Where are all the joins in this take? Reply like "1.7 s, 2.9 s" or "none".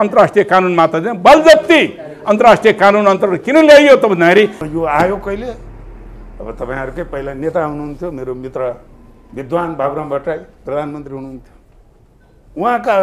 4.6 s